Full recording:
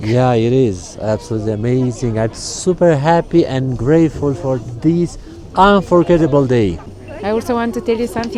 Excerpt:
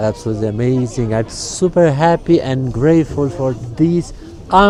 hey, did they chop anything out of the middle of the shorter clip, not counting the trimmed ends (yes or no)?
no